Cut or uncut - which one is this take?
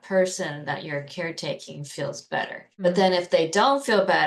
cut